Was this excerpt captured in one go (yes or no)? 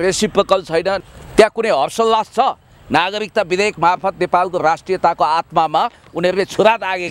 no